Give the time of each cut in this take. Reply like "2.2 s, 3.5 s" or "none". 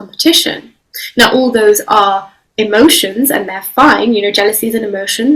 none